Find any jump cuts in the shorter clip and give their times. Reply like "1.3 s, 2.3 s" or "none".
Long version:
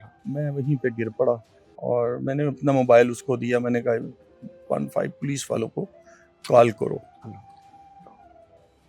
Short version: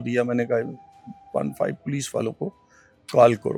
none